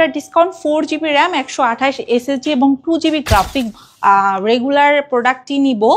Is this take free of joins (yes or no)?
no